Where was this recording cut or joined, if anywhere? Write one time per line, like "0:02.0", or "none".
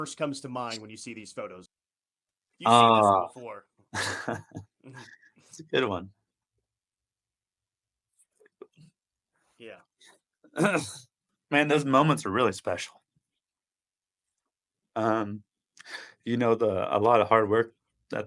0:01.6